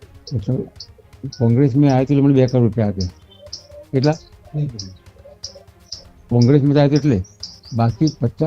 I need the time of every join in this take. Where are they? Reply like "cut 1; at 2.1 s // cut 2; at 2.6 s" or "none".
none